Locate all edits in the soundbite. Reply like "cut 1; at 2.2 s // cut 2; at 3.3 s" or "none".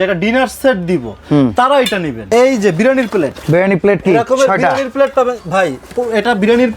cut 1; at 2.2 s